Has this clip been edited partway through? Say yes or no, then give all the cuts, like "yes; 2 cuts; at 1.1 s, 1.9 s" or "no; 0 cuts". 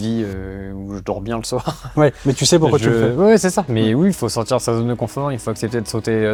no; 0 cuts